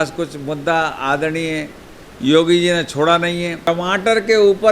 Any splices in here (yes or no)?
yes